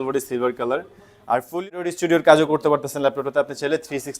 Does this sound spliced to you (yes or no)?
yes